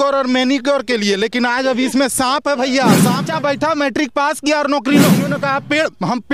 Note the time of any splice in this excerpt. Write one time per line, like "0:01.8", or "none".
0:03.2
0:05.3